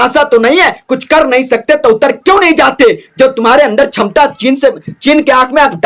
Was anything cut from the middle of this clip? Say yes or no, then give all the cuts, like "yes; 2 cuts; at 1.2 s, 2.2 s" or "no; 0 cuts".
no; 0 cuts